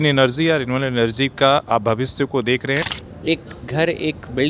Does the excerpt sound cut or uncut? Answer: cut